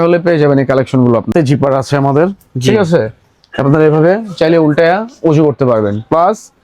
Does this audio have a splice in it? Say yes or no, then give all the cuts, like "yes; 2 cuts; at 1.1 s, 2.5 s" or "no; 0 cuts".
yes; 1 cut; at 1.3 s